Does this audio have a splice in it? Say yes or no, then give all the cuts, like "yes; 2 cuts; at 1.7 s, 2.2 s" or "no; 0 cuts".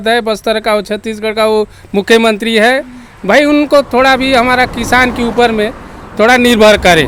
no; 0 cuts